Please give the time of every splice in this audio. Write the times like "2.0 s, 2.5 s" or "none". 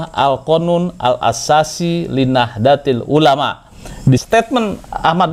4.2 s